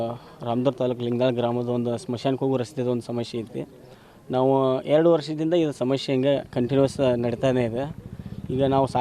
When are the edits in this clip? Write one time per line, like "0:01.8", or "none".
none